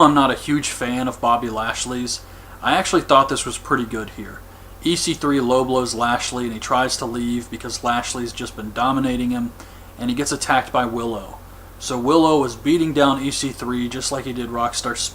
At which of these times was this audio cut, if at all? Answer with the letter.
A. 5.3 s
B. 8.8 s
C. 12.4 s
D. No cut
B